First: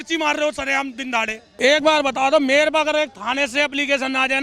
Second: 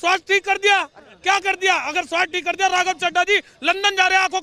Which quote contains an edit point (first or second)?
first